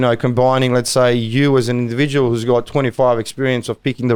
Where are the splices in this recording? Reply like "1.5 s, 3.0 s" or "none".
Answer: none